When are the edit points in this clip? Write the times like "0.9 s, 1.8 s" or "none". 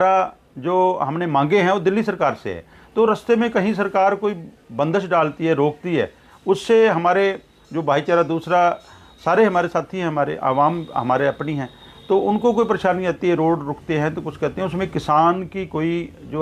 none